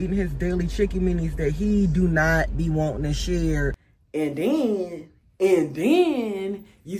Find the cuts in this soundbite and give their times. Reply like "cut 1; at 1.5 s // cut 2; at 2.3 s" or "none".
cut 1; at 3.9 s

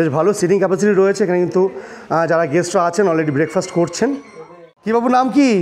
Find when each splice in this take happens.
cut 1; at 4.7 s

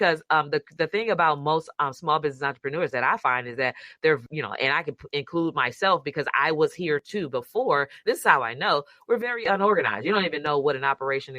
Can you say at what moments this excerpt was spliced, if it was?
cut 1; at 4.3 s

